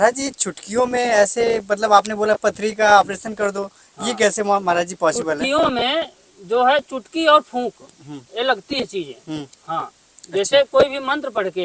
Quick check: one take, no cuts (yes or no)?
yes